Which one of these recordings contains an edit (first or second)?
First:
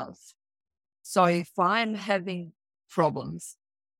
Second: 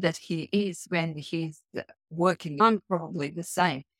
second